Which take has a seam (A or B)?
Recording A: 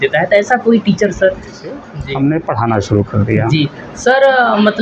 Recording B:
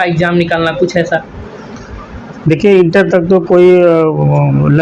A